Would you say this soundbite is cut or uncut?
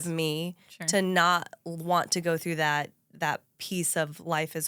uncut